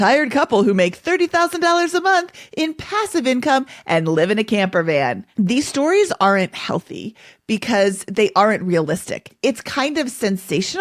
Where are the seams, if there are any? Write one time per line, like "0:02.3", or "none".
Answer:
0:09.3